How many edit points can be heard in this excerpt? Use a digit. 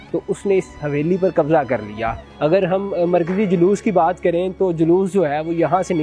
1